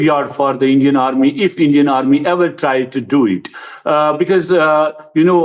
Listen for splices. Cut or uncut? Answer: uncut